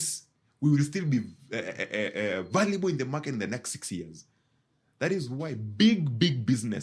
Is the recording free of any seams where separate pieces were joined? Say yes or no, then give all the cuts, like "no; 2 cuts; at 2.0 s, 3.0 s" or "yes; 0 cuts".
yes; 0 cuts